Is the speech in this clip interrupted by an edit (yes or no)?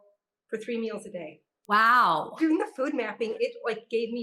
yes